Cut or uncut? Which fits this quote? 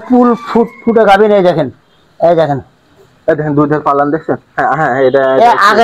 uncut